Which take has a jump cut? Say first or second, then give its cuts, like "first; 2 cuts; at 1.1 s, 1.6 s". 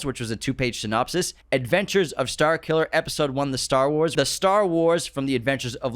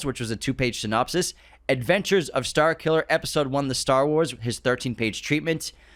first; 2 cuts; at 1.4 s, 4.1 s